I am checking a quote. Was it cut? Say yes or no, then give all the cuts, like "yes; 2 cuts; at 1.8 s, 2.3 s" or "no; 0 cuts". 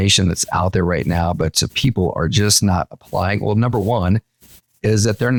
no; 0 cuts